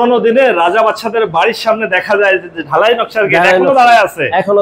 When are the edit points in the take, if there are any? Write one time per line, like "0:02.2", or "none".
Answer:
none